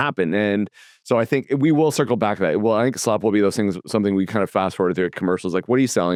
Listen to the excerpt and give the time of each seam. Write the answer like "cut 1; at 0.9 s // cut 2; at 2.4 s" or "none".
none